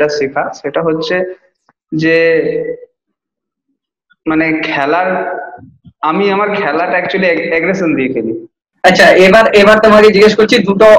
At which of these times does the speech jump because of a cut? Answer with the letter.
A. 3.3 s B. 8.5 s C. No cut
B